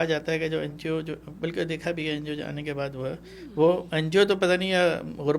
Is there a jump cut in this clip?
no; 0 cuts

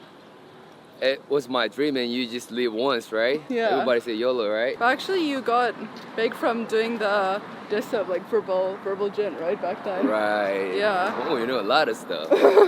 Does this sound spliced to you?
yes; 1 cut; at 4.8 s

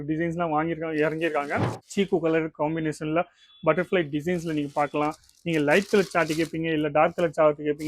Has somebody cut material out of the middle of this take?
yes; 1 cut; at 1.8 s

